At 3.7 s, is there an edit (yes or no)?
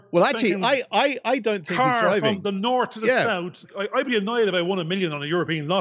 yes